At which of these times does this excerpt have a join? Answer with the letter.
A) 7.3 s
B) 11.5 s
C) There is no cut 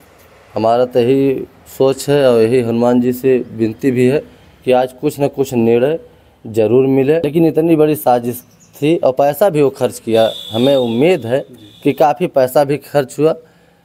A